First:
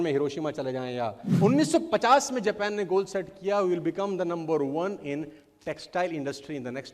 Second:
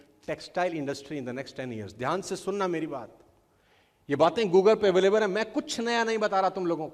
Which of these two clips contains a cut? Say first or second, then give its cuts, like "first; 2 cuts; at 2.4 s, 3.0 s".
first; 1 cut; at 1.2 s